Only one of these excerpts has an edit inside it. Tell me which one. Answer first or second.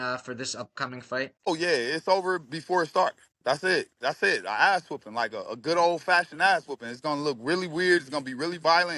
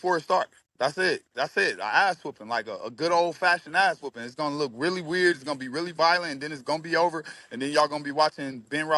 first